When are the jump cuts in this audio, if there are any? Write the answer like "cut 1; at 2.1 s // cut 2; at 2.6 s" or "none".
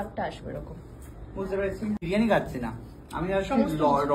cut 1; at 2.0 s